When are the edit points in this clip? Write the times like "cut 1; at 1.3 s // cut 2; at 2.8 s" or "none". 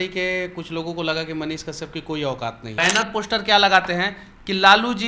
cut 1; at 2.8 s